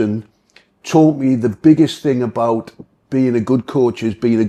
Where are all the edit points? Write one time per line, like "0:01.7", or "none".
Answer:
none